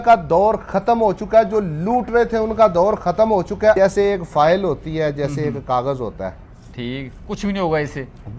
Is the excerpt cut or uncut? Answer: cut